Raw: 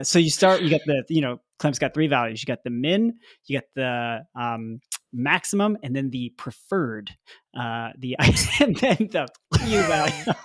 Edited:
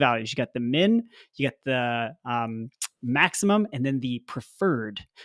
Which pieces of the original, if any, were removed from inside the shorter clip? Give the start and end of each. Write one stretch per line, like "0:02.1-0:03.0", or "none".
none